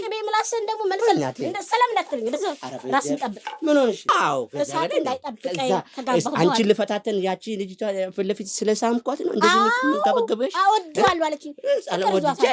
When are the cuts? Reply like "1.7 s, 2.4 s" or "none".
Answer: 4.2 s